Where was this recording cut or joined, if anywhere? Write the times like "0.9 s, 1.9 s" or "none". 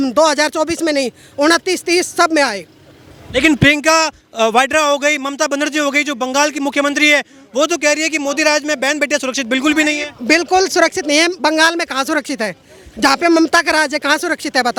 none